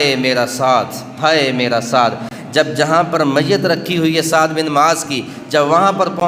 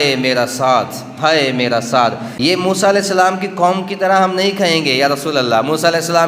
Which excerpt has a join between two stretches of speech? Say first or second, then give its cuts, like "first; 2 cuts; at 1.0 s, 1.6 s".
second; 1 cut; at 2.3 s